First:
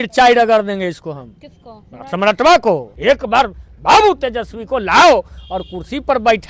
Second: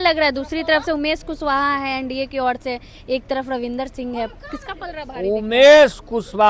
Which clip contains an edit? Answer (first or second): first